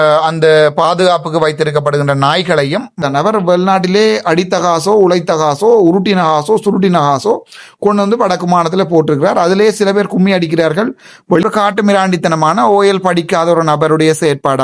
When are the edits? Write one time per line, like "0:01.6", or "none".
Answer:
0:03.0
0:11.4